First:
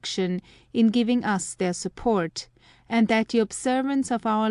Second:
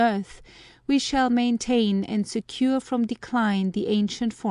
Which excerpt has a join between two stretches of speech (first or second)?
second